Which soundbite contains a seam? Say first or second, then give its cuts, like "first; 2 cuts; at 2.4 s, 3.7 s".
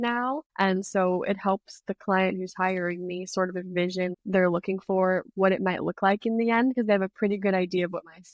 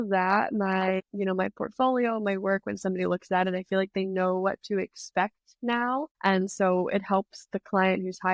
first; 1 cut; at 4.2 s